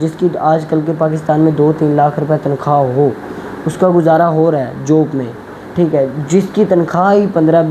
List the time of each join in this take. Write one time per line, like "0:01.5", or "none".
none